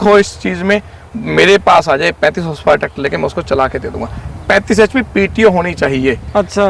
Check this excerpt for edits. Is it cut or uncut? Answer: uncut